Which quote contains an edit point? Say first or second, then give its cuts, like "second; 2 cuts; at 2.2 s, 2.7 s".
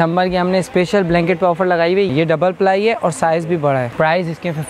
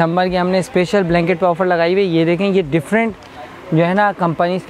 first; 2 cuts; at 2.1 s, 3.9 s